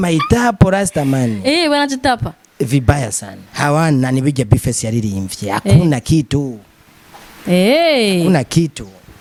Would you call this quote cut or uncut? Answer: uncut